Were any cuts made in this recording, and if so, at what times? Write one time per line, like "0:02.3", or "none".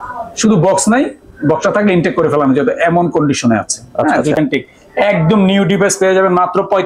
0:04.3